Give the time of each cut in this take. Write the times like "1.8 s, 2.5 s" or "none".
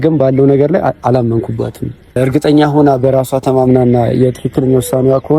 2.2 s